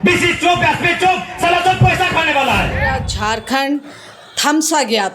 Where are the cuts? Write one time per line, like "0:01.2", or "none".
0:03.1